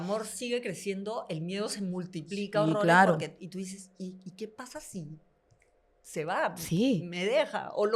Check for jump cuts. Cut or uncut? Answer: uncut